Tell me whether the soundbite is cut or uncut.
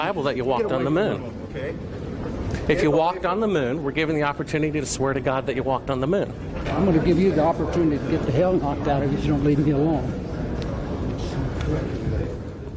uncut